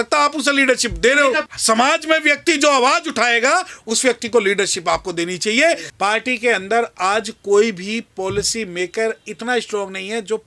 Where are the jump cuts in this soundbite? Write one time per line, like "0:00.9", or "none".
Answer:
0:01.5
0:05.9

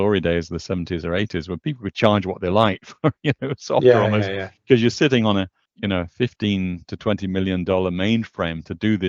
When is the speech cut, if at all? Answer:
0:05.6

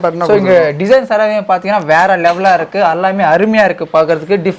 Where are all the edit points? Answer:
none

